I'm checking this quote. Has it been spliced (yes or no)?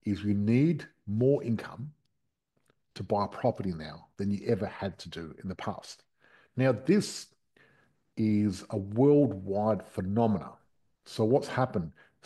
no